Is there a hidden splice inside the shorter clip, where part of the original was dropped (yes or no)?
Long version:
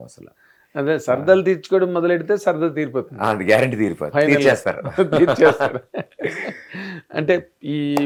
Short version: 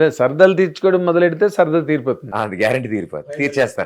no